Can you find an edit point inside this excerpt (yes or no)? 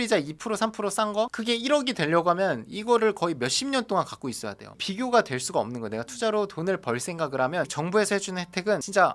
yes